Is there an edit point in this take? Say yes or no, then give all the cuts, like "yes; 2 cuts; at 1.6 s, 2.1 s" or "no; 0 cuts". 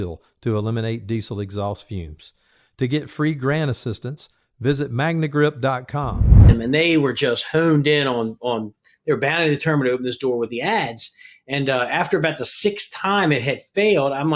yes; 1 cut; at 6.4 s